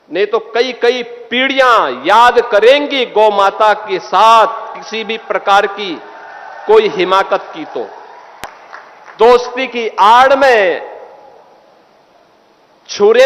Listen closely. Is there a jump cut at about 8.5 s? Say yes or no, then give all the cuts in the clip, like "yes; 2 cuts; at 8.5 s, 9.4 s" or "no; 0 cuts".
yes; 1 cut; at 8.5 s